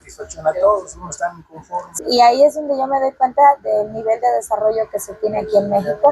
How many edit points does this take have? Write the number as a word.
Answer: one